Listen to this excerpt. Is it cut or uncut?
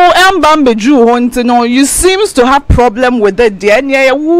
uncut